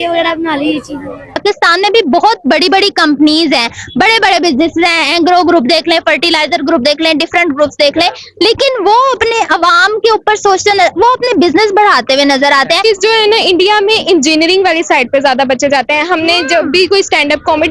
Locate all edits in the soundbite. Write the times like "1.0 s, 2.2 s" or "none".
1.3 s, 12.8 s